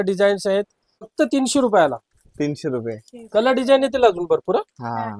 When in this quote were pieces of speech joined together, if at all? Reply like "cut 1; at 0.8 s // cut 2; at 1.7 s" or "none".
cut 1; at 1.1 s